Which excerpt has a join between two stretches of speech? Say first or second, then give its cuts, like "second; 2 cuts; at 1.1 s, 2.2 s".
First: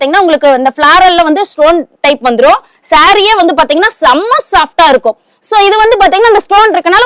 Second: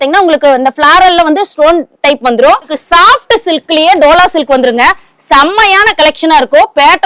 second; 1 cut; at 2.8 s